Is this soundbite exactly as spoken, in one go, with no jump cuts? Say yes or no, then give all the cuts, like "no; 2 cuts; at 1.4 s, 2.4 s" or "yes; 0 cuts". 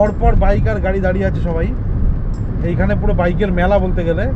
yes; 0 cuts